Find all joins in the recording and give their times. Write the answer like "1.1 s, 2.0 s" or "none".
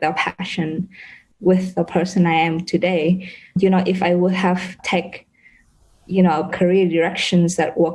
1.2 s, 3.6 s, 4.8 s, 6.5 s